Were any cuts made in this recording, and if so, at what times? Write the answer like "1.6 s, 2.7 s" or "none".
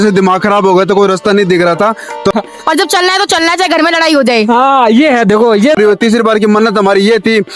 2.3 s, 5.8 s